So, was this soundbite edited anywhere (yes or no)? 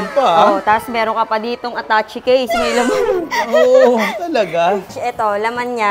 yes